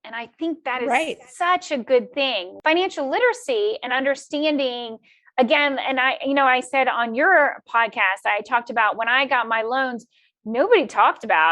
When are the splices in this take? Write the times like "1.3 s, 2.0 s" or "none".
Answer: 2.5 s